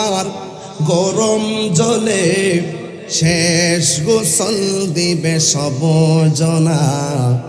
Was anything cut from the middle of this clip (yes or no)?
no